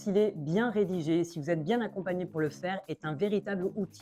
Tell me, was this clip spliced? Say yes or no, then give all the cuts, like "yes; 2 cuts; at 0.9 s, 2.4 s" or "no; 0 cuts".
no; 0 cuts